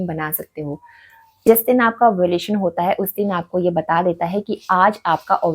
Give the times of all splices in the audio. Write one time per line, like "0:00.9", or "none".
0:01.4